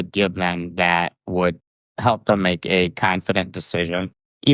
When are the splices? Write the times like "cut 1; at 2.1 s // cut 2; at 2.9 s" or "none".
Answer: none